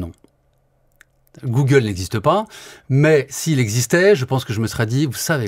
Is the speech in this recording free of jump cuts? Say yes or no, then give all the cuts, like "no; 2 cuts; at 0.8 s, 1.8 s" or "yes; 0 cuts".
yes; 0 cuts